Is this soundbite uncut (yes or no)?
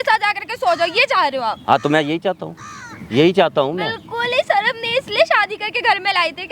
yes